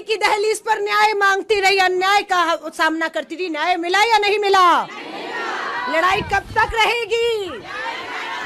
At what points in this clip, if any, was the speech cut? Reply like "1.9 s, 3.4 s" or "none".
none